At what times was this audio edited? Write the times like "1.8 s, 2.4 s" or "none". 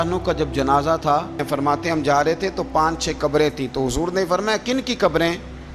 1.4 s